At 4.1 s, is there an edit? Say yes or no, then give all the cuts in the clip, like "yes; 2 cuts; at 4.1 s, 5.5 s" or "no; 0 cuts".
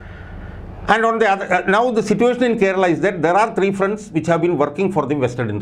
no; 0 cuts